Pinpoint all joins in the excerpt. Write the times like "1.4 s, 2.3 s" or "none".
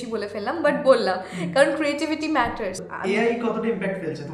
2.9 s